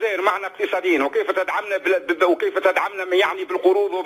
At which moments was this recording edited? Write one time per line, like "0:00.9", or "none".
none